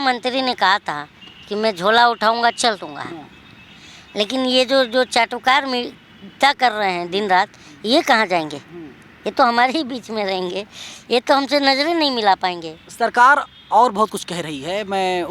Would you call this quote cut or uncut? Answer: uncut